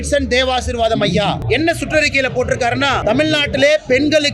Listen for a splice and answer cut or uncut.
cut